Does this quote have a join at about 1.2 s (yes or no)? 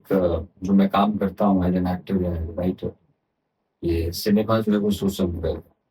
no